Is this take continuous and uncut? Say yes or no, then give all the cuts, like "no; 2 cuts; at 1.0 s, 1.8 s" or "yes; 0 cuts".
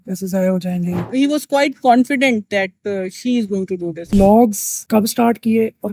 no; 2 cuts; at 1.1 s, 4.1 s